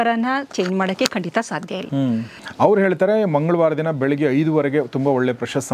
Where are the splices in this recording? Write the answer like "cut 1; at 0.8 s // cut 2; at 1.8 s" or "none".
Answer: cut 1; at 2.4 s